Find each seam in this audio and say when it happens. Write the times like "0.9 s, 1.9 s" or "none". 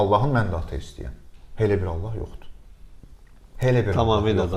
none